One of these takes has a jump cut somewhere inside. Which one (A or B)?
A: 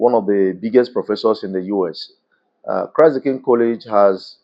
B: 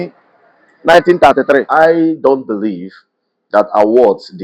B